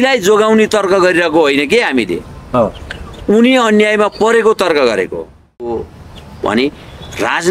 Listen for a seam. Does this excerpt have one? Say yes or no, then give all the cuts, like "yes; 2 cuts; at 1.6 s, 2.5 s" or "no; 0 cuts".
yes; 1 cut; at 5.6 s